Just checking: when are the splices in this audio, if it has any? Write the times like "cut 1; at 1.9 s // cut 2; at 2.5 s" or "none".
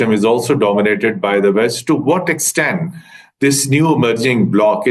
none

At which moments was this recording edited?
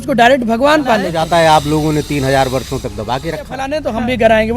cut 1; at 1.1 s // cut 2; at 3.6 s

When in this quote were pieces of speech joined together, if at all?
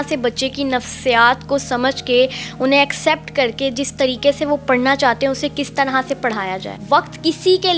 cut 1; at 6.7 s

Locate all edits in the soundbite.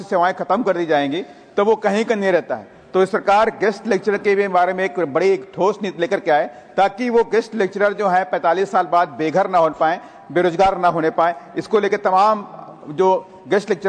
none

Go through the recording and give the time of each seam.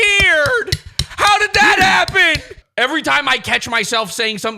cut 1; at 2.6 s

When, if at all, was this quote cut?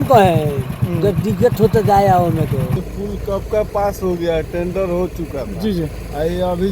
cut 1; at 2.8 s

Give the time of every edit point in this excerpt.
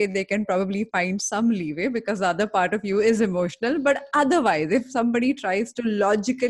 none

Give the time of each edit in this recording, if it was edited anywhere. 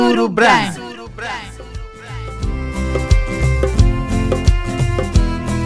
cut 1; at 1.5 s

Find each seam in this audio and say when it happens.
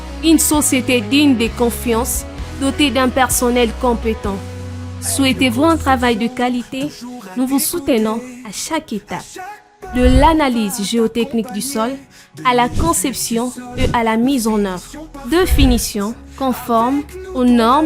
cut 1; at 1.9 s

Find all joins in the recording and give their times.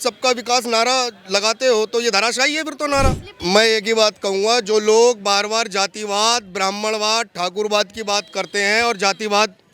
cut 1; at 3.3 s

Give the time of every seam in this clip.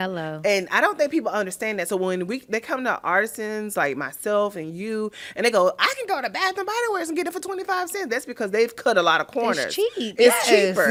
none

